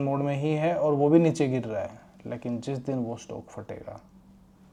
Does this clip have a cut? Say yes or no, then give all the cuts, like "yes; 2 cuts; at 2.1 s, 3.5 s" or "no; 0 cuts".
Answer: no; 0 cuts